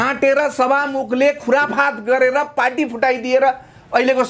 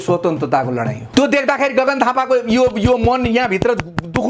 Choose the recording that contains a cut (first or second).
second